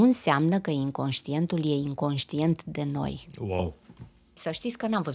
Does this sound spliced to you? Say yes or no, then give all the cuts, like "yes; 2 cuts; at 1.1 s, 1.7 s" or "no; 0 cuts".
yes; 1 cut; at 4.3 s